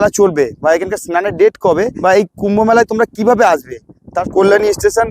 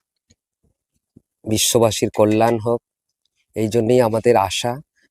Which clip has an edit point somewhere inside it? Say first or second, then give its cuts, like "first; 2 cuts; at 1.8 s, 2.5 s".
first; 2 cuts; at 1.9 s, 4.2 s